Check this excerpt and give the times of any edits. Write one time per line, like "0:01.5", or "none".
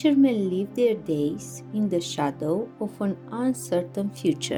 none